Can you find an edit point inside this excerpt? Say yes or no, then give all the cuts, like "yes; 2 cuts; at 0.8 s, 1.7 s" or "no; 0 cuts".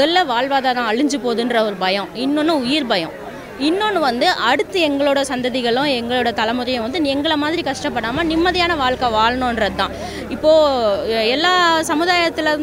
no; 0 cuts